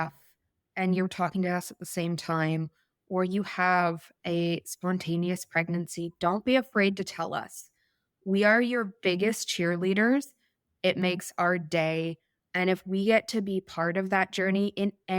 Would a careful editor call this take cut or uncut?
cut